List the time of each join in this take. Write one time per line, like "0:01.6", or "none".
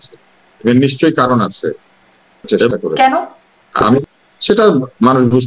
0:02.7
0:04.1